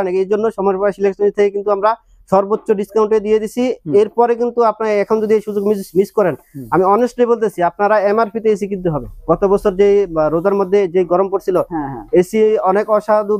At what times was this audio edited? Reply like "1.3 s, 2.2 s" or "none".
none